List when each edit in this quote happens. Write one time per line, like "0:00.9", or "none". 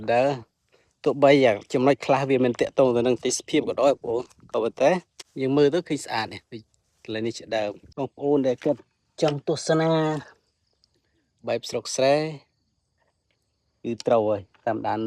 0:05.2
0:07.8